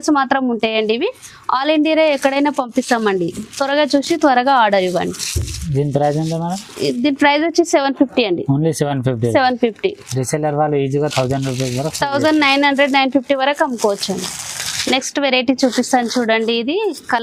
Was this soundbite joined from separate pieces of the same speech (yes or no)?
no